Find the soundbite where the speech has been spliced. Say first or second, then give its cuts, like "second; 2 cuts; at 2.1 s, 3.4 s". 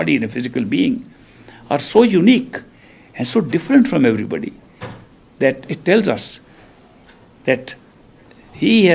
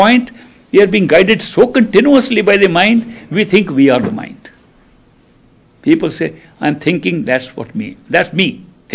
second; 1 cut; at 3.9 s